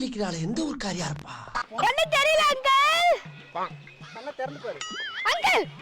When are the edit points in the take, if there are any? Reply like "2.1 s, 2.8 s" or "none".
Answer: 1.9 s